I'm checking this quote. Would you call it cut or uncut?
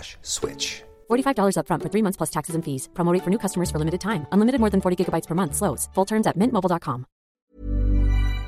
cut